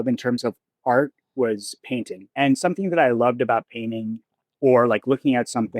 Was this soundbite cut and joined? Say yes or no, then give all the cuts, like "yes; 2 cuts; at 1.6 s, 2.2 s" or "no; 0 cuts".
yes; 1 cut; at 2.3 s